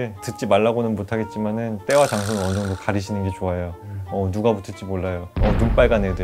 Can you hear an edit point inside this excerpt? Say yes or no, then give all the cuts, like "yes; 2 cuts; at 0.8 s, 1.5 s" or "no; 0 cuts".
yes; 1 cut; at 5.3 s